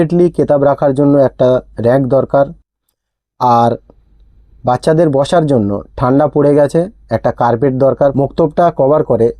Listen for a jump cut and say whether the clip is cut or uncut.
cut